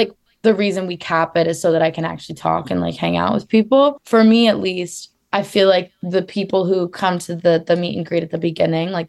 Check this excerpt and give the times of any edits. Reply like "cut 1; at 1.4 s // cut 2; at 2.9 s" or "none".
cut 1; at 4.0 s